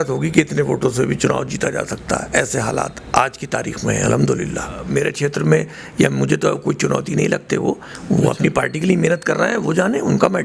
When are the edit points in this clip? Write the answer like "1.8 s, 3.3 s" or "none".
4.8 s